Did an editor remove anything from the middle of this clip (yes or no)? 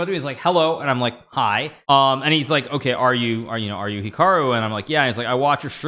yes